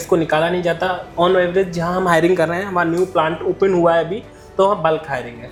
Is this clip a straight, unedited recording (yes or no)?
yes